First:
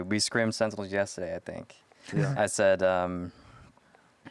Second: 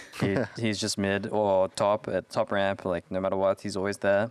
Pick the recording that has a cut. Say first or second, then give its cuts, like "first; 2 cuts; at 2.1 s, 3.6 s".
first; 1 cut; at 2.3 s